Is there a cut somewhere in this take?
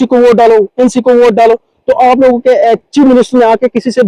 no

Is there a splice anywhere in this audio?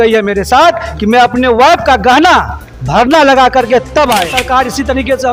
yes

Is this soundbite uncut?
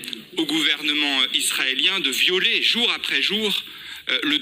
yes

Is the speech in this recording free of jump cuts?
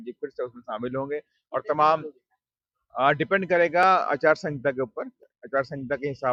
yes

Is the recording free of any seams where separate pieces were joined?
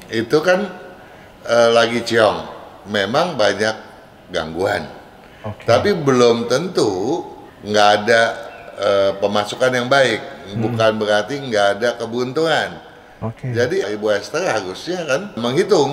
yes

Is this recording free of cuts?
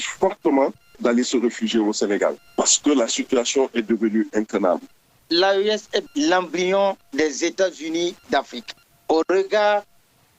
no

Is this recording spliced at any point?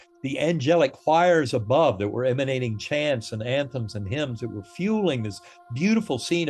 no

